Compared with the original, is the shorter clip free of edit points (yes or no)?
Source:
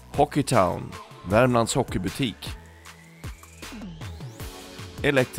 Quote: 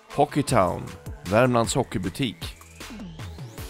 no